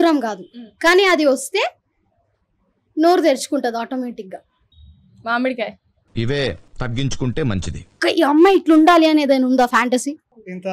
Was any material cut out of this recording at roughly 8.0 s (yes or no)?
yes